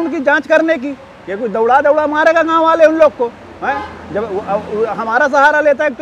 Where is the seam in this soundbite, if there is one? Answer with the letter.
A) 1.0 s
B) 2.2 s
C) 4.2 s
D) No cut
D